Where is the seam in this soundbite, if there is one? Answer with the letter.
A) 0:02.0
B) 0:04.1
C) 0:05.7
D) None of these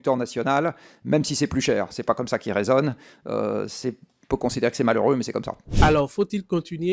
D